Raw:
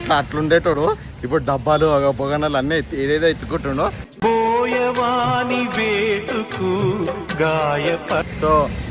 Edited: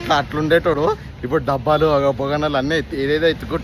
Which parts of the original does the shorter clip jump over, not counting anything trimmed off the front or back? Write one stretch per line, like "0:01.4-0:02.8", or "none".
none